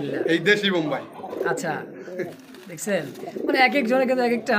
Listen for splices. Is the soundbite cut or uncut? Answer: uncut